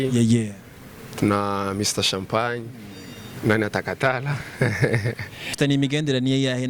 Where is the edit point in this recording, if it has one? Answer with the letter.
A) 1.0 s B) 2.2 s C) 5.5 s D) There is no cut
C